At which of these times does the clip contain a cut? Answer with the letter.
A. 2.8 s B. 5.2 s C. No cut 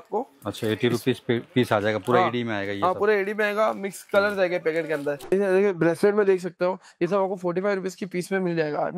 B